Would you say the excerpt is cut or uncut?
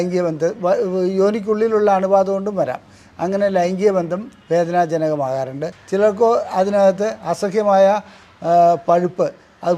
cut